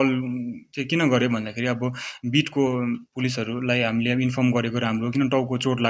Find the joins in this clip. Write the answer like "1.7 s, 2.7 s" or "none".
none